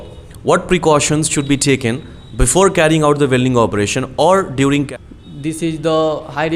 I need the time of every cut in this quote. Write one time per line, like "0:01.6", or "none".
0:04.9